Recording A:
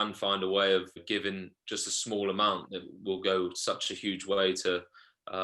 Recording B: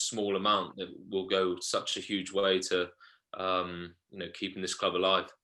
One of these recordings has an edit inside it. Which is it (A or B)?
A